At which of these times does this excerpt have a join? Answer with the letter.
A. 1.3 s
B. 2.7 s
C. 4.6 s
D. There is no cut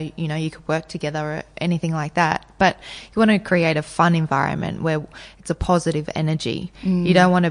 D